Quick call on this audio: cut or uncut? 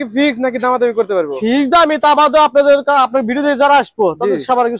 uncut